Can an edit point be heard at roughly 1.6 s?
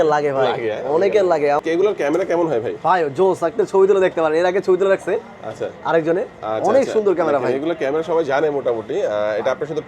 yes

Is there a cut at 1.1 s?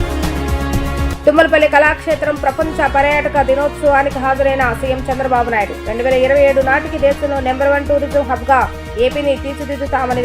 yes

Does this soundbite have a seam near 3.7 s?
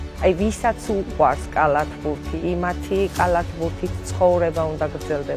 no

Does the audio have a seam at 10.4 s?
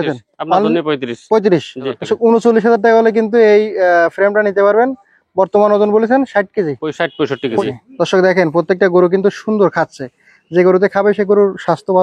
no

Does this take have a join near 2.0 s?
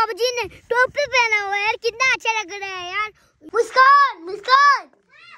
no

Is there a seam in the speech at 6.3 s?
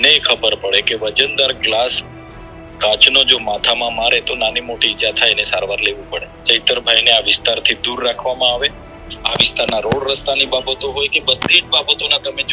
yes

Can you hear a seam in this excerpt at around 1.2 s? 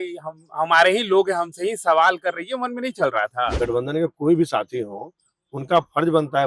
no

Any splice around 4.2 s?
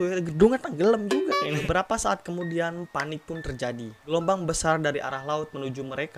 no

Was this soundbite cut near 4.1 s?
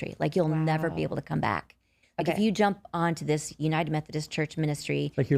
no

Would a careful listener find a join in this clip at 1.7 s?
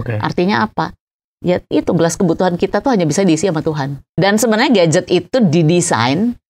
no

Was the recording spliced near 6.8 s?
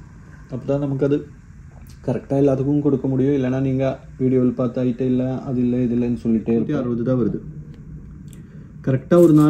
yes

